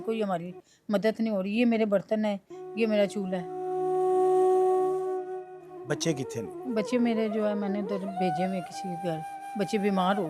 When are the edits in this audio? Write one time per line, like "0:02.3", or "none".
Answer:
0:03.5
0:05.5